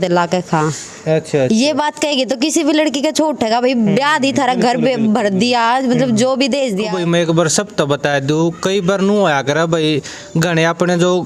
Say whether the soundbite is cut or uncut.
cut